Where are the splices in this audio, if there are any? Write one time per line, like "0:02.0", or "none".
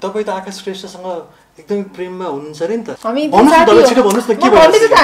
0:02.9

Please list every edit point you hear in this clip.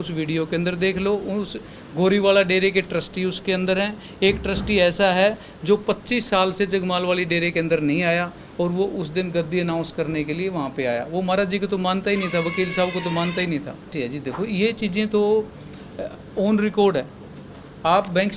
0:13.9

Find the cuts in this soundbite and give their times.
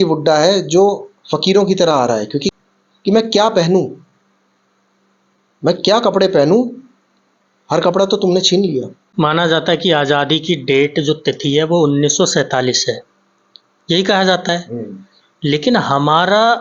0:02.5
0:09.0

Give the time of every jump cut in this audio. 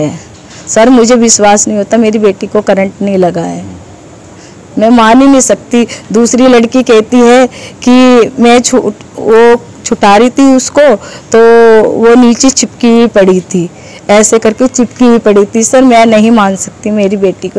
none

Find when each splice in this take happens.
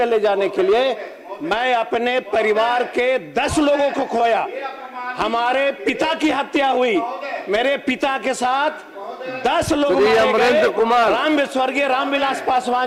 none

